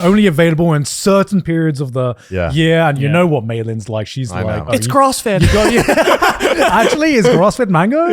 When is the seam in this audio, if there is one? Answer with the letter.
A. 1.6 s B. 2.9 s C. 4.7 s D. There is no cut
C